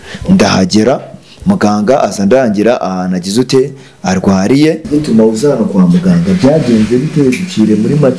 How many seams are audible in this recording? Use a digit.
1